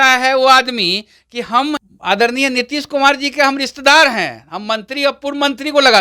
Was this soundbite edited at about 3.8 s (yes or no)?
no